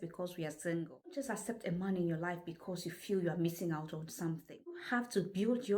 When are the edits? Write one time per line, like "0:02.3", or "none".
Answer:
0:01.2
0:04.8